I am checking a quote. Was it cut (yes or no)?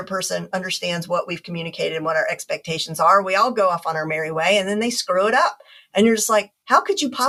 no